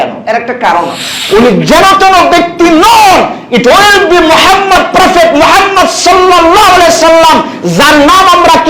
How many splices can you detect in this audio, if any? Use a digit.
1